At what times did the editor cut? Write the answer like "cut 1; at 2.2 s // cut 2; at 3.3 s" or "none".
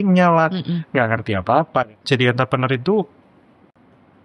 cut 1; at 1.9 s